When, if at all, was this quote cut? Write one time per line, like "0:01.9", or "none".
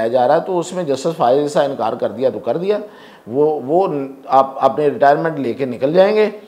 none